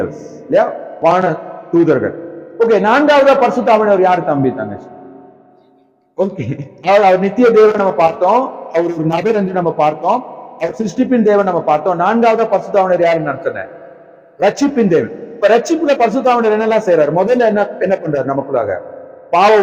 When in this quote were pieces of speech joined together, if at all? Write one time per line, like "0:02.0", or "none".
none